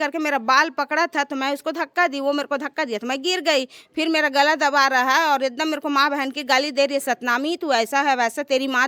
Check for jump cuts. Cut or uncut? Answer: uncut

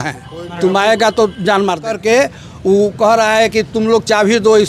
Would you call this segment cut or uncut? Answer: cut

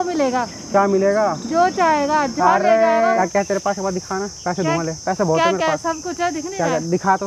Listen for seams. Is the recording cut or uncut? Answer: cut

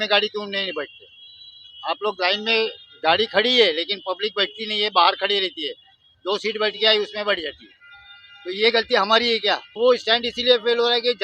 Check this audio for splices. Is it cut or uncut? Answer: cut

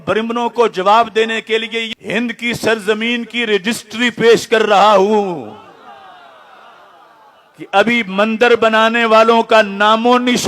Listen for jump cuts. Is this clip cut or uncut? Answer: cut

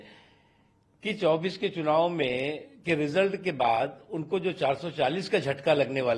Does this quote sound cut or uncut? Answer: uncut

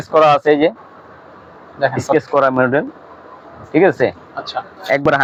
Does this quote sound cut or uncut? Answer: uncut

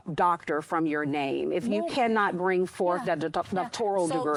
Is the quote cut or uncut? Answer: uncut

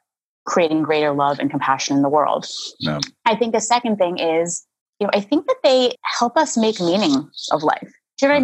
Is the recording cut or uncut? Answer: cut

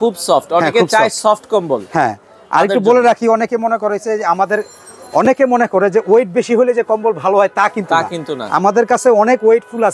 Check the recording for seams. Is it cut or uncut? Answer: uncut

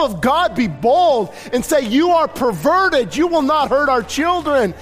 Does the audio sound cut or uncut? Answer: uncut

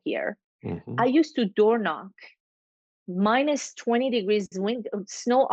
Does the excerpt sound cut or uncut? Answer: uncut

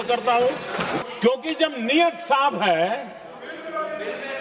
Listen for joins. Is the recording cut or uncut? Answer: cut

